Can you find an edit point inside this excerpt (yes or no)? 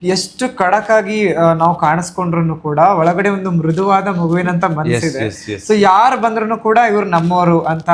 no